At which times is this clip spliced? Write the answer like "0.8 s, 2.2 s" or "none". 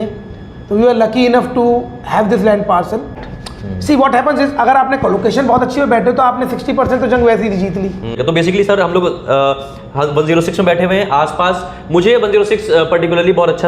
3.2 s, 8.2 s